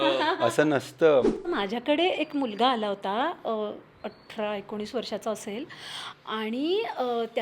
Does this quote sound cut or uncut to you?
cut